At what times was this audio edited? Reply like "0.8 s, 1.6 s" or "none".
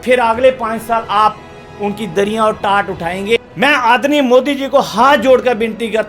3.4 s